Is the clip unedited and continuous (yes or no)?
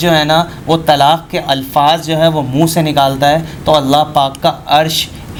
yes